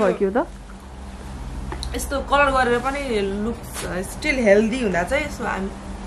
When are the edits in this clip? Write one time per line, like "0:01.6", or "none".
none